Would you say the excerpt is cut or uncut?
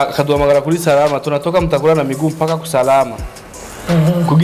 uncut